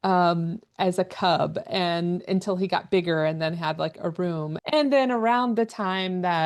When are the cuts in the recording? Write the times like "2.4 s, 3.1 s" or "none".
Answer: 4.5 s